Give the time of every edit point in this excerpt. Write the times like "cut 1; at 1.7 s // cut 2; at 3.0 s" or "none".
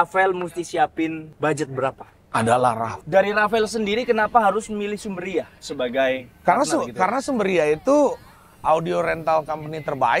cut 1; at 1.3 s // cut 2; at 3.0 s